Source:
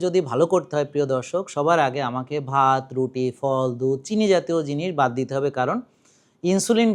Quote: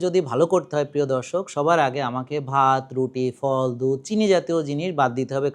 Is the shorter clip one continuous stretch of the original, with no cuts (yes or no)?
yes